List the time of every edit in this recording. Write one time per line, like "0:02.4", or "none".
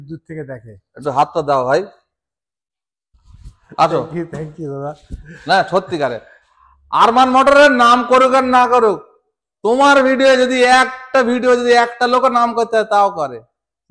none

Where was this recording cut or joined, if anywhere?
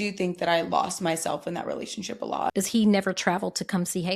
0:02.5

